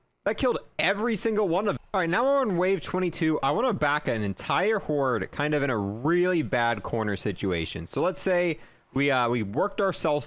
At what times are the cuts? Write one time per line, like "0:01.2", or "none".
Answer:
0:01.8